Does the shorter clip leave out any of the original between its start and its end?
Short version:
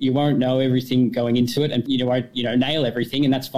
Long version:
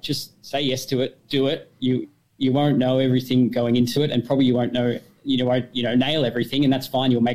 yes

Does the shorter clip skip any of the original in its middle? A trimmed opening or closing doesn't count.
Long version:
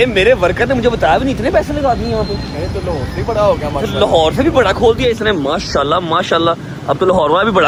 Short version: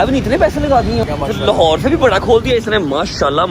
yes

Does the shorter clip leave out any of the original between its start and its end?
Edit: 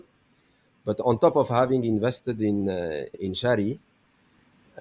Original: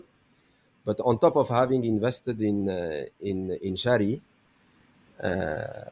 yes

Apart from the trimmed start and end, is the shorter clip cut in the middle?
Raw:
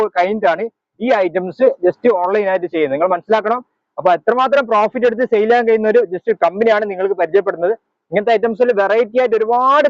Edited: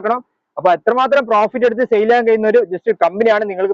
no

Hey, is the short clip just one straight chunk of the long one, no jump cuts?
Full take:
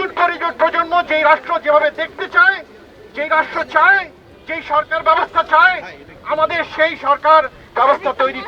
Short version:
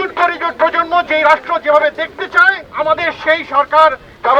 no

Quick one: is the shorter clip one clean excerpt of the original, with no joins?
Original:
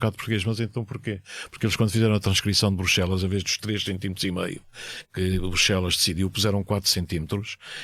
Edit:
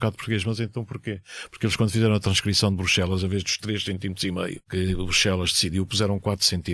no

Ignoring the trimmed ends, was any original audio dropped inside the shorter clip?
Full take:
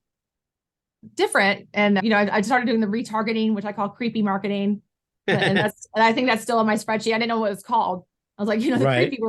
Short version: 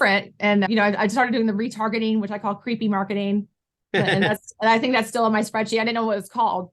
no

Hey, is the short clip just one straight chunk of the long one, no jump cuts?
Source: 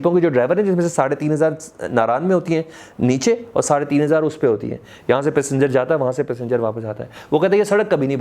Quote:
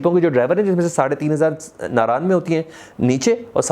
yes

